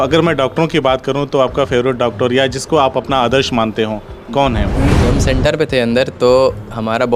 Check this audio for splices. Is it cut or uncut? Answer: cut